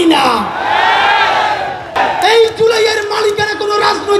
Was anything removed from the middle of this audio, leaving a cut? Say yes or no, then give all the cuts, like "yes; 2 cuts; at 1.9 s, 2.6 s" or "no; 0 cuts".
yes; 1 cut; at 2.0 s